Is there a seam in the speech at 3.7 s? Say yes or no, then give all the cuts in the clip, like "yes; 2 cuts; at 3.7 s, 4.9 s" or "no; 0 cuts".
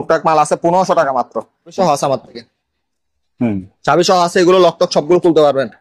no; 1 cut; at 1.8 s